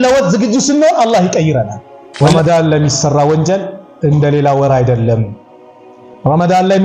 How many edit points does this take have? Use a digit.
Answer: 1